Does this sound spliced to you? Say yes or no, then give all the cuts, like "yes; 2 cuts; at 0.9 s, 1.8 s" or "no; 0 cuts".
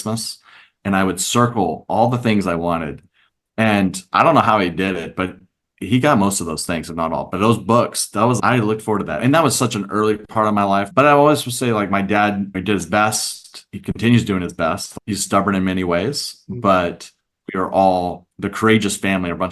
yes; 1 cut; at 10.9 s